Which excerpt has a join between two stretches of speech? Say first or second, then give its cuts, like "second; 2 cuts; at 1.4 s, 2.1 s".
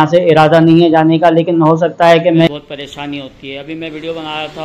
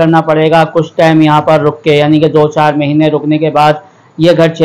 first; 1 cut; at 2.5 s